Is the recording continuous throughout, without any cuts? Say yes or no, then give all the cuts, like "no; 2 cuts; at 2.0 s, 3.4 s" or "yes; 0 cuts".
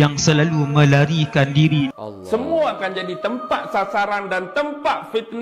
no; 1 cut; at 1.9 s